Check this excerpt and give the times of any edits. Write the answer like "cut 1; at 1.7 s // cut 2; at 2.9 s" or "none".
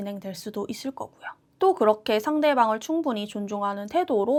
none